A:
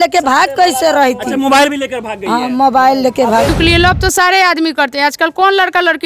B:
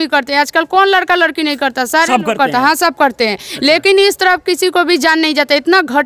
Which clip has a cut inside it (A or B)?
A